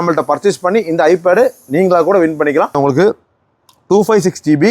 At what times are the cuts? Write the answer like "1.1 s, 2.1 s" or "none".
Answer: 2.7 s